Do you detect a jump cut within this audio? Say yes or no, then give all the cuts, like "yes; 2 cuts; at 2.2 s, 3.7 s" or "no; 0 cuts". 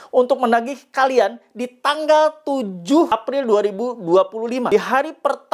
yes; 2 cuts; at 3.1 s, 4.7 s